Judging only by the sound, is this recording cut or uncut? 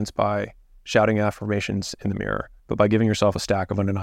cut